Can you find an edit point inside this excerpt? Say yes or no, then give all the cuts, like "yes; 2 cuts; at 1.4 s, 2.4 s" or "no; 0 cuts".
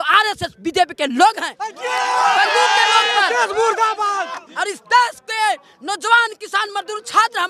yes; 1 cut; at 4.4 s